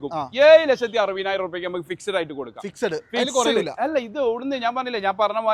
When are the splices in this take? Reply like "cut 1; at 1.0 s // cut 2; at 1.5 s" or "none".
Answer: none